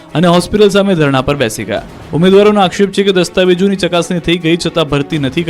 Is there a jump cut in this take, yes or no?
yes